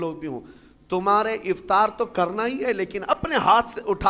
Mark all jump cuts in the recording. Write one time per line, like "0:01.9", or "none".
none